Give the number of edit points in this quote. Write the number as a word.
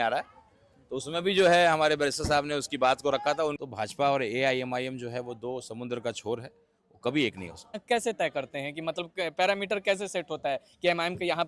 two